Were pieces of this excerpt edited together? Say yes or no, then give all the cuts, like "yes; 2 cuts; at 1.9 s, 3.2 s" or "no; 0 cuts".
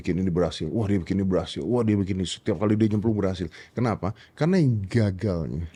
no; 0 cuts